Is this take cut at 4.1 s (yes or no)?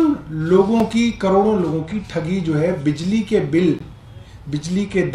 no